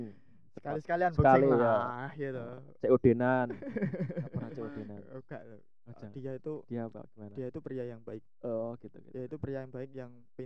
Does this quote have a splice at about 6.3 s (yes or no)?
no